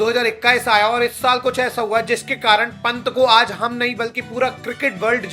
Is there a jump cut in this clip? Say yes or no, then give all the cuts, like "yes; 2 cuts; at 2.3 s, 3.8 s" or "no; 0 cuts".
no; 0 cuts